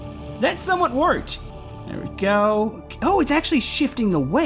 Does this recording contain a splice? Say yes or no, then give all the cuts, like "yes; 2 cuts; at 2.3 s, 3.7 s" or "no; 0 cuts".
yes; 1 cut; at 1.3 s